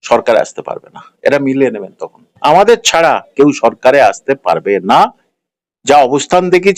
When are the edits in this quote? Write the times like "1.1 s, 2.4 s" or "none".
none